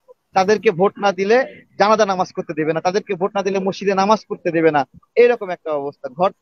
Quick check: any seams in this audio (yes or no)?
no